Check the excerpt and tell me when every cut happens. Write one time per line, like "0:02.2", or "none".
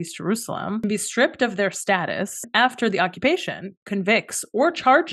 0:00.8
0:02.5